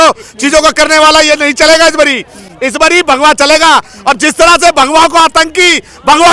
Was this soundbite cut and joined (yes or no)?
no